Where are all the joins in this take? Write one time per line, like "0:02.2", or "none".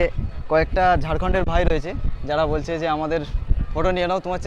none